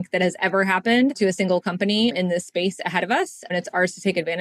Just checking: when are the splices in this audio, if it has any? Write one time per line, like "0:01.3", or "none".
0:01.2
0:02.1
0:03.5